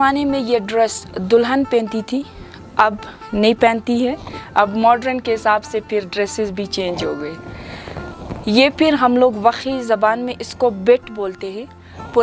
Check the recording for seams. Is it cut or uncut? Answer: uncut